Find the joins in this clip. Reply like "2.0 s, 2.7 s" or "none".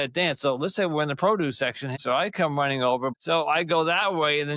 2.0 s, 3.2 s